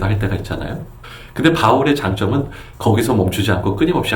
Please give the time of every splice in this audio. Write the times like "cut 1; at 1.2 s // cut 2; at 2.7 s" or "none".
none